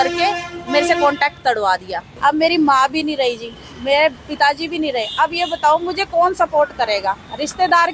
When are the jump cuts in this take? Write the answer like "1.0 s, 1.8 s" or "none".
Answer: 2.1 s